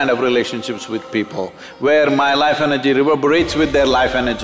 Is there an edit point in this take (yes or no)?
no